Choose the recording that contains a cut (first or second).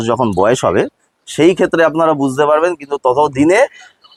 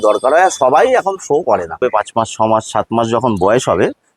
second